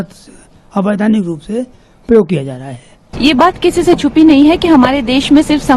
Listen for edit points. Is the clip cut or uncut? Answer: cut